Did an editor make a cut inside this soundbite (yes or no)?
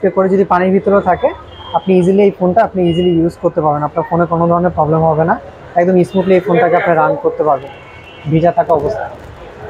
no